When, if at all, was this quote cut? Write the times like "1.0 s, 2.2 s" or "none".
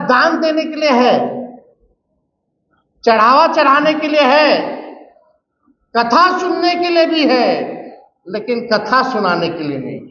none